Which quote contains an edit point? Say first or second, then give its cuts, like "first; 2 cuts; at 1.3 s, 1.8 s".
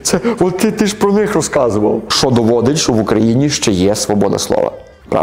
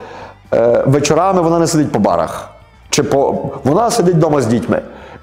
first; 1 cut; at 2.1 s